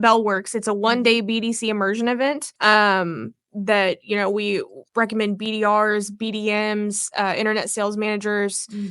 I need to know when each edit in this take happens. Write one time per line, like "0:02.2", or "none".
0:02.5
0:04.8